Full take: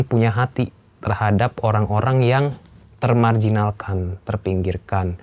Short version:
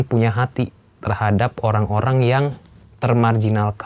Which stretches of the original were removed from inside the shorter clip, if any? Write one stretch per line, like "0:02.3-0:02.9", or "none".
none

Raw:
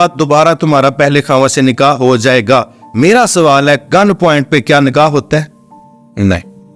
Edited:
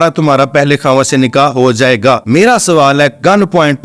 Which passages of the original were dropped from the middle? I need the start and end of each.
0:02.7-0:02.9

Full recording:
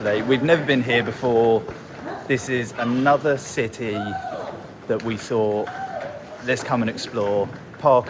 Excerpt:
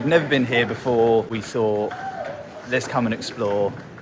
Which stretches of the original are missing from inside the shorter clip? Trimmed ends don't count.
0:01.7-0:05.1

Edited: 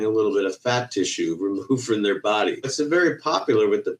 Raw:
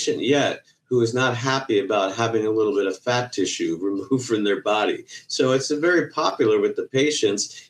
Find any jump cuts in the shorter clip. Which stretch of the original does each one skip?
0:05.1-0:05.6

